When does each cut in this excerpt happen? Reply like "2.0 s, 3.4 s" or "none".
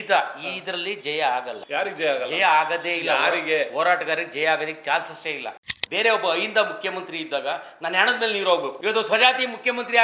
1.6 s, 5.7 s, 8.7 s